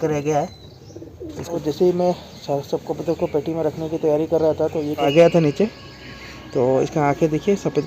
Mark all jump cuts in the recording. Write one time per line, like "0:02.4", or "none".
0:01.6
0:05.1